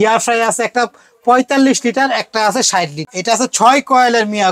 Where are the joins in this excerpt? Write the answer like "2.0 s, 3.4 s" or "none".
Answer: 3.0 s